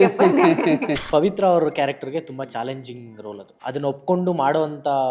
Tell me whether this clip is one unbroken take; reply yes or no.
no